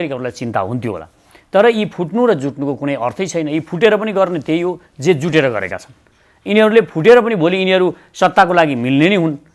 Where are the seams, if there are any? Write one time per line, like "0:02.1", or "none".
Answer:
none

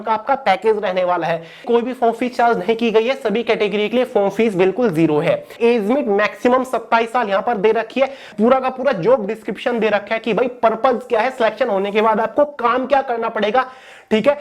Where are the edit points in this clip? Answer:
0:01.6
0:05.5
0:08.3

